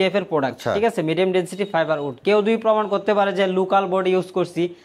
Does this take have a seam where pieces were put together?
no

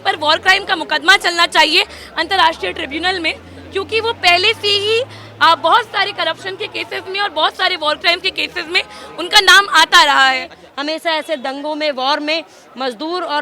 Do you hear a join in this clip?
yes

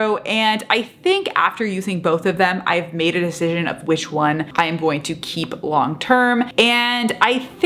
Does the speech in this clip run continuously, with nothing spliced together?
no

